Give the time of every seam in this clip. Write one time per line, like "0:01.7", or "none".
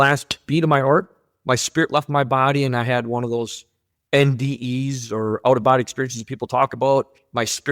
none